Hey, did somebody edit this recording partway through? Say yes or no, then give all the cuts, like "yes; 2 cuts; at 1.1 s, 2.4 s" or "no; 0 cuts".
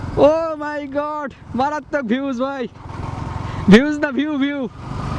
no; 0 cuts